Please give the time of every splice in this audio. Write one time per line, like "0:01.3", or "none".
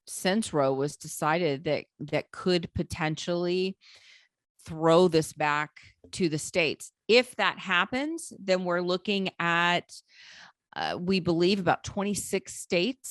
none